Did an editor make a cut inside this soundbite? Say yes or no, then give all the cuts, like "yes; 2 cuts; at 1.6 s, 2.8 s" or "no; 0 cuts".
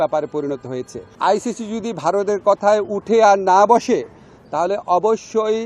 yes; 1 cut; at 1.1 s